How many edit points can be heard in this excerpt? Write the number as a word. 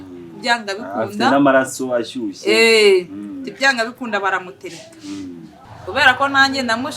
one